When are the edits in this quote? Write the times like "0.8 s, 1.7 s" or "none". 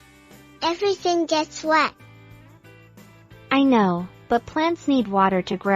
1.9 s, 3.5 s